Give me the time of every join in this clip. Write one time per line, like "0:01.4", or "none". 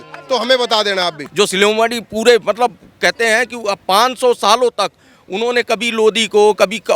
0:01.2